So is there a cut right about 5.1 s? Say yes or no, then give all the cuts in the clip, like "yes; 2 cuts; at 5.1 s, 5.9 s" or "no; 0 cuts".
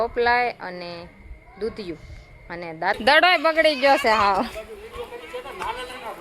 no; 1 cut; at 2.8 s